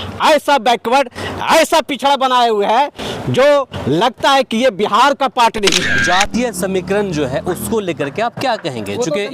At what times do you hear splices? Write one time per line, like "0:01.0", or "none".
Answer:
0:06.0

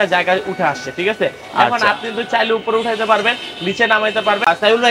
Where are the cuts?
none

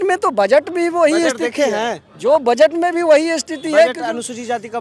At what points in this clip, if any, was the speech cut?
none

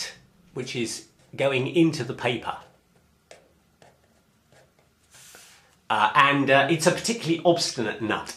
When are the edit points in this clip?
none

